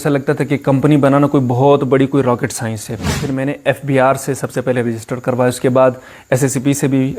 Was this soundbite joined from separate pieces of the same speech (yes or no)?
yes